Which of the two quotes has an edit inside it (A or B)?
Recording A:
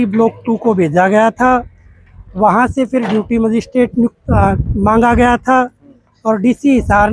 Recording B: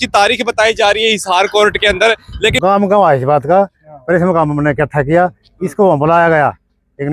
B